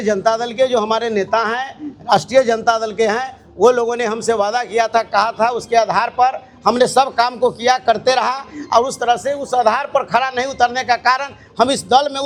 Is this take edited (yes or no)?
no